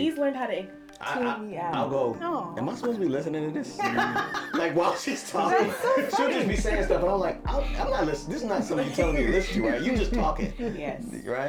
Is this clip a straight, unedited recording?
yes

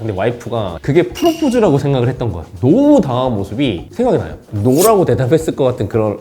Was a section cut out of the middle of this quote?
yes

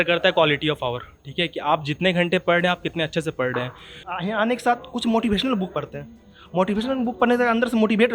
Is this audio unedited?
no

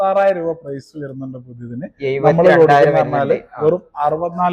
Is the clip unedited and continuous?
yes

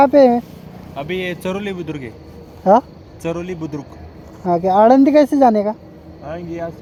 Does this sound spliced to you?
no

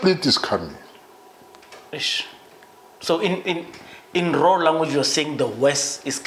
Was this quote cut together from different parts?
no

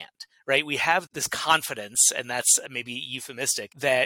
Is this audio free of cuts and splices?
no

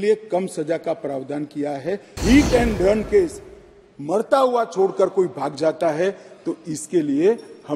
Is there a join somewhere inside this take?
yes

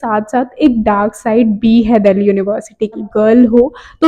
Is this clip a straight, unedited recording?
no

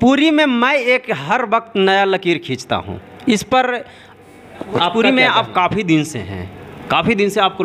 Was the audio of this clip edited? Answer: yes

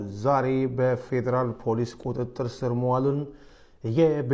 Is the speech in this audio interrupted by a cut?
no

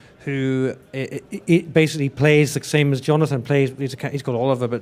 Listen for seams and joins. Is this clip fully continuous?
no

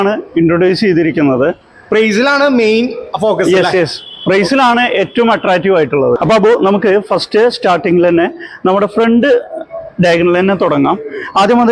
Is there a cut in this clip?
no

